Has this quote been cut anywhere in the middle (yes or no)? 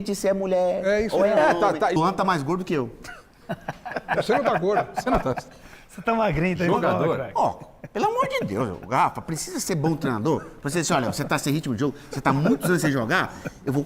yes